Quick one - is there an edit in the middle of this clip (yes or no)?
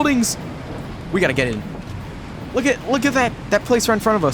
yes